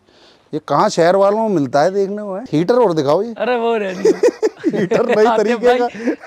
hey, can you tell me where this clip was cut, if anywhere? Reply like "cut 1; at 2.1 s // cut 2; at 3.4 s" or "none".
cut 1; at 2.5 s

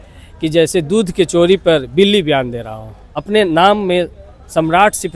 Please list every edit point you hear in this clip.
cut 1; at 3.1 s

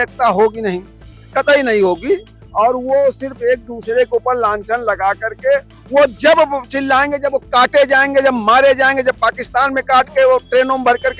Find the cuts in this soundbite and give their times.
none

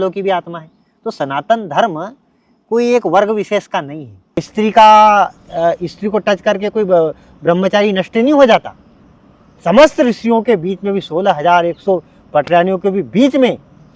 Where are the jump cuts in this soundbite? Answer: cut 1; at 4.4 s

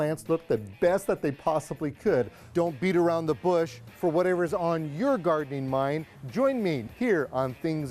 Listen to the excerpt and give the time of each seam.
cut 1; at 6.8 s

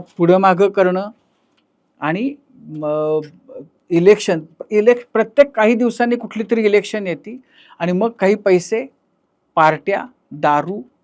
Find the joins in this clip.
none

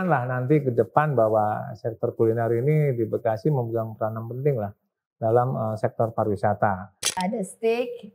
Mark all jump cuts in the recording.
cut 1; at 7.2 s

